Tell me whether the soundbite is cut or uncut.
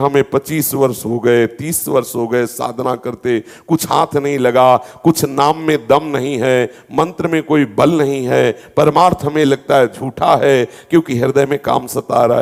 uncut